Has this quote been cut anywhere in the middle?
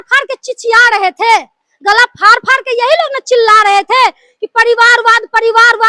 no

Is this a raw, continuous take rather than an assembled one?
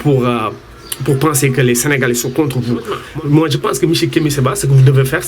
no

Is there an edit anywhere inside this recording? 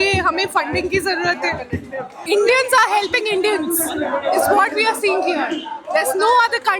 yes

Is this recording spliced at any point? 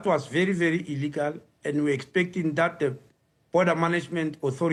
no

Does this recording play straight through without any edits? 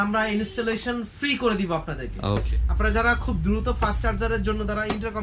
no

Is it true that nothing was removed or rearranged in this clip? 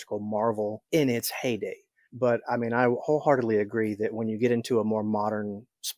yes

